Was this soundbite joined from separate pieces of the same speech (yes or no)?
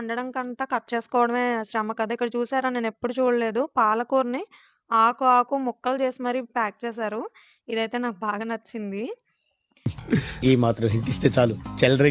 no